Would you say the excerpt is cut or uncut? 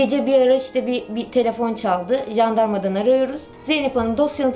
cut